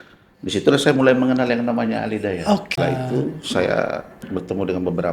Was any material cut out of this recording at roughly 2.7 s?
yes; 1 cut; at 2.7 s

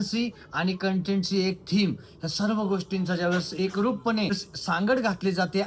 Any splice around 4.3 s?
yes; 1 cut; at 4.3 s

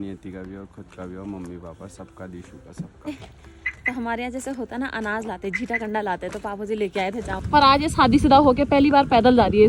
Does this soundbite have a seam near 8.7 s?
no; 2 cuts; at 3.1 s, 7.4 s

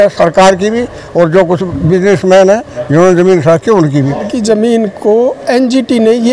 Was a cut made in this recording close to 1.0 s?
no; 1 cut; at 4.3 s

